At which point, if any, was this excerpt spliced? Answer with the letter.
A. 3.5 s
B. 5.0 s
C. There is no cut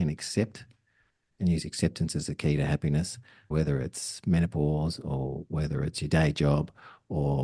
A